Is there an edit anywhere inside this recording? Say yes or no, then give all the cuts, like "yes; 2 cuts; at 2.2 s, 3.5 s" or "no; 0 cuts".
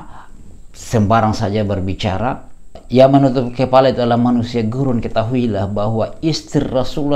yes; 1 cut; at 2.8 s